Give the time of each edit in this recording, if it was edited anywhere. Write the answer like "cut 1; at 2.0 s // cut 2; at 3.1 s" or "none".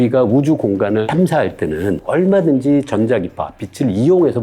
cut 1; at 1.1 s